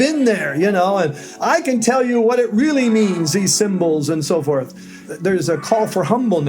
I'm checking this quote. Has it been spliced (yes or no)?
yes